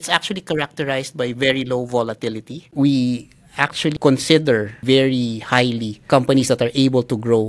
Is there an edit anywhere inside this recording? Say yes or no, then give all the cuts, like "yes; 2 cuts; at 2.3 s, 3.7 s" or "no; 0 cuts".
yes; 2 cuts; at 2.7 s, 4.7 s